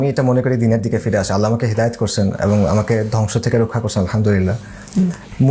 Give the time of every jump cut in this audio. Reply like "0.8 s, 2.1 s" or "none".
none